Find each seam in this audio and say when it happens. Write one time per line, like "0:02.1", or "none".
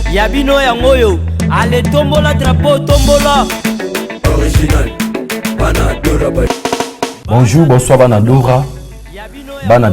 0:00.9